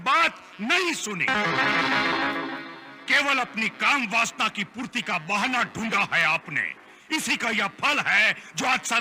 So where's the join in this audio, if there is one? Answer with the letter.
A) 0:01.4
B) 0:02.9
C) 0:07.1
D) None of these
D